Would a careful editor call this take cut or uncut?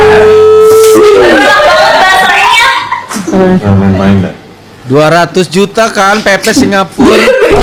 uncut